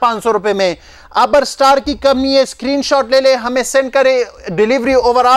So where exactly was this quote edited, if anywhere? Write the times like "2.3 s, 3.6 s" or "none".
none